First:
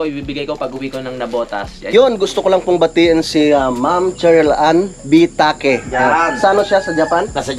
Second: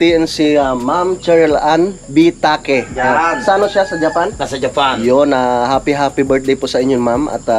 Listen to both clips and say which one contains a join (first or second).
first